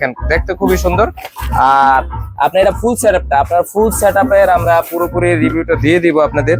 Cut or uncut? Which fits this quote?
uncut